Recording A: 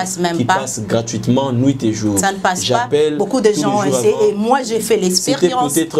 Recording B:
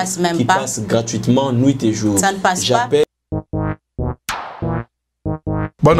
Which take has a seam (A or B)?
B